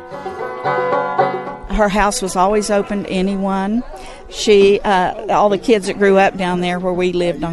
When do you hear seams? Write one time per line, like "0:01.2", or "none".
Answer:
none